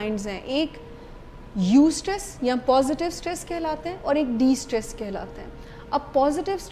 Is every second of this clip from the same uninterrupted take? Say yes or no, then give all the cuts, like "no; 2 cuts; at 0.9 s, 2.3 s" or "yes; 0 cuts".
yes; 0 cuts